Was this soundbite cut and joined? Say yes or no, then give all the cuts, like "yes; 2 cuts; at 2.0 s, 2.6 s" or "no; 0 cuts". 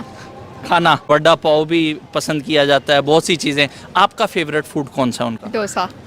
yes; 1 cut; at 1.0 s